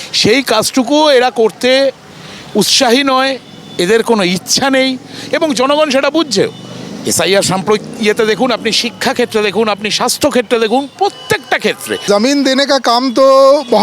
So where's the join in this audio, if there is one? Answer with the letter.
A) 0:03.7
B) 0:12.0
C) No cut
B